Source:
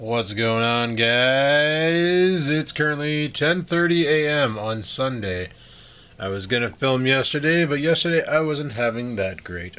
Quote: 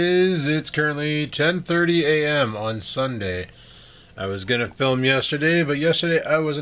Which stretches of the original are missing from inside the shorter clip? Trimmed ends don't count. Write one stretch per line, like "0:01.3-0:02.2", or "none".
none